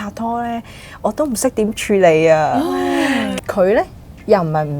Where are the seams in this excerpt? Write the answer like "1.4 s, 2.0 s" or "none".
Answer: 3.3 s